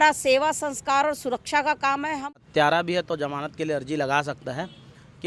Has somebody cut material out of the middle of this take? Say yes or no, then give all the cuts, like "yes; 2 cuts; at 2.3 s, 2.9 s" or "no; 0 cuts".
yes; 1 cut; at 2.4 s